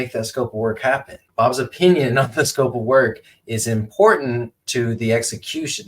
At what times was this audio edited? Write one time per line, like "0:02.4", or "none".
0:01.2